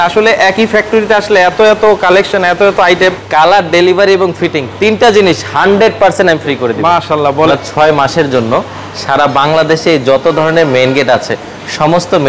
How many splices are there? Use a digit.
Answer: 2